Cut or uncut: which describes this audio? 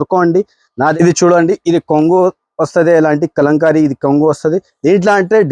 cut